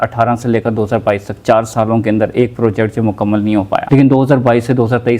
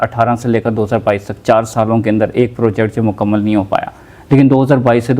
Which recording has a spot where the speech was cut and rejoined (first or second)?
first